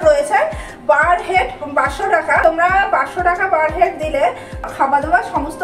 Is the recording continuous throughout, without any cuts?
no; 2 cuts; at 2.4 s, 4.7 s

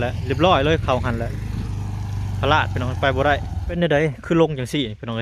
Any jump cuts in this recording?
yes; 1 cut; at 3.8 s

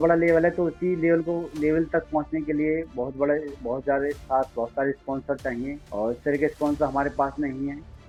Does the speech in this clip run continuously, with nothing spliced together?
yes; 0 cuts

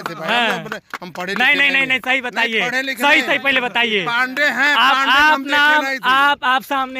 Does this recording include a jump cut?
no; 0 cuts

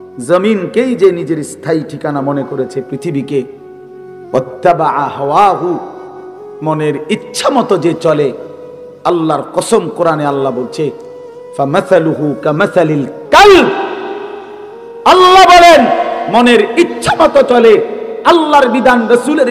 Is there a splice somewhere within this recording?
no; 0 cuts

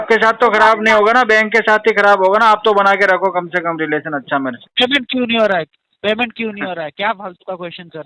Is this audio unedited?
no; 1 cut; at 4.7 s

